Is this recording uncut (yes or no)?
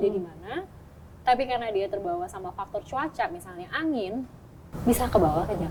yes